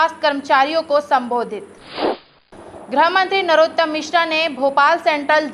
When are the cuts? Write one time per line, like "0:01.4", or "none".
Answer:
0:02.0